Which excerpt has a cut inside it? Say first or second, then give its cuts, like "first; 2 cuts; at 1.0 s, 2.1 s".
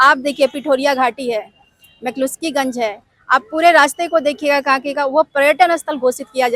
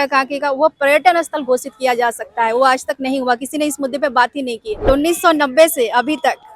second; 1 cut; at 4.9 s